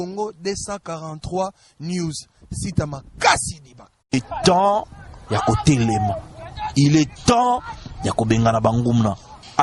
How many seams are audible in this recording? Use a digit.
1